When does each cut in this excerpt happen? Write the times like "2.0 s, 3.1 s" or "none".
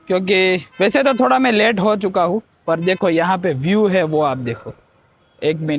none